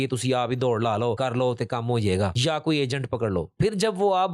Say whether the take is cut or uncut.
cut